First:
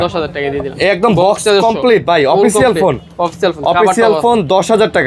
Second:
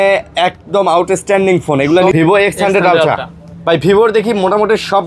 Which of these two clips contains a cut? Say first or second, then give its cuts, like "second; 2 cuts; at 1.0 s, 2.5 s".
second; 1 cut; at 2.1 s